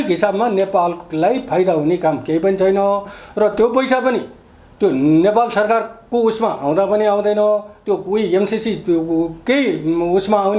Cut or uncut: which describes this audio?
uncut